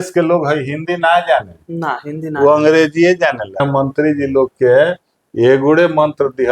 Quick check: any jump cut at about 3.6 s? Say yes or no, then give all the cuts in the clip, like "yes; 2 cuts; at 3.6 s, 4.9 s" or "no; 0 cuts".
yes; 1 cut; at 3.6 s